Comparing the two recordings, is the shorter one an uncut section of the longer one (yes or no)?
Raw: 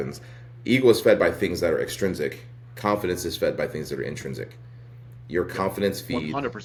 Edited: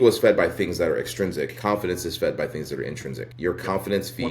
no